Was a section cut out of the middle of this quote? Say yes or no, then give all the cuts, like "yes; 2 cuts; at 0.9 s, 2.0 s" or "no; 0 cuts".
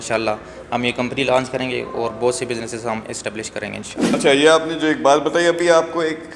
yes; 1 cut; at 4.0 s